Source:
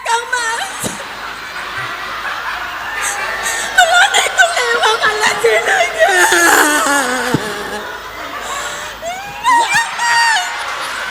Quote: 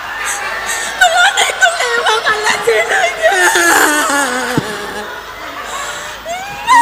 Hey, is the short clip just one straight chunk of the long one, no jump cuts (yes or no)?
yes